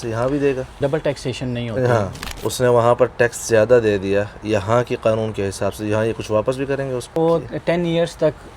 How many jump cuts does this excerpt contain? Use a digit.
3